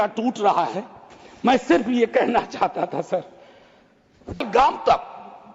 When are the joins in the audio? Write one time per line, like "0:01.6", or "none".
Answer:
0:04.4